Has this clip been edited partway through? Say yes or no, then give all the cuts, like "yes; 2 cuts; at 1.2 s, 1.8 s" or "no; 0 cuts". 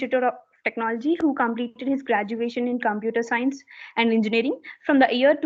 no; 0 cuts